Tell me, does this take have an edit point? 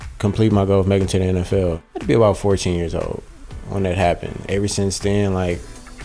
yes; 2 cuts; at 1.8 s, 4.3 s

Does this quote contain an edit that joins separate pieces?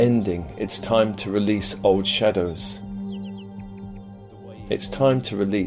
yes; 2 cuts; at 2.5 s, 4.4 s

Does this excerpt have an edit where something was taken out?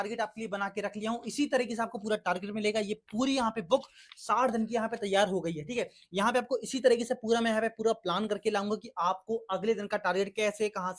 no; 0 cuts

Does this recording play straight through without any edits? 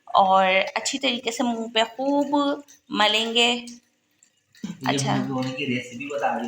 yes; 0 cuts

